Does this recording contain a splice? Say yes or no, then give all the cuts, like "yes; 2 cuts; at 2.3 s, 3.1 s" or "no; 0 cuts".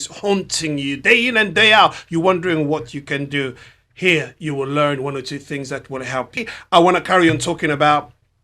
yes; 1 cut; at 6.5 s